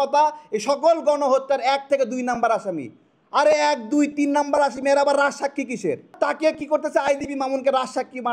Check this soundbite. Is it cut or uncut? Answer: cut